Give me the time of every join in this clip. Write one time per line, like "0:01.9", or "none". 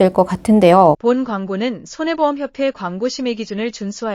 0:01.0

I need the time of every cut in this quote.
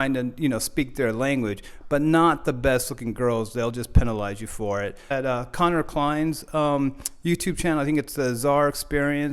0:05.1

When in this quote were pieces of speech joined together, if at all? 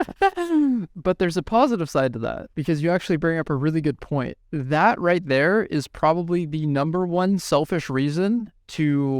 0:00.9
0:02.4
0:04.4

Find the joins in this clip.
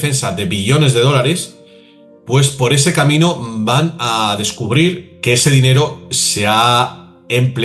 0:05.1

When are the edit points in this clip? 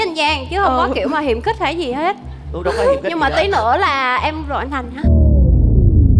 none

